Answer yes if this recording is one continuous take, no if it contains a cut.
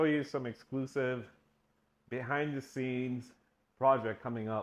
yes